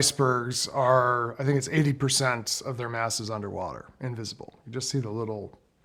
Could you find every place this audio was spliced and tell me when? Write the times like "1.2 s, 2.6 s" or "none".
none